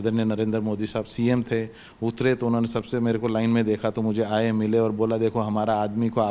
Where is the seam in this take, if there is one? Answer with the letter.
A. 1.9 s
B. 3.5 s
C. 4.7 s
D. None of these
D